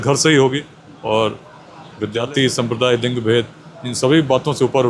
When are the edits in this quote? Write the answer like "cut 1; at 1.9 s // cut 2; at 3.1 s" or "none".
cut 1; at 2.1 s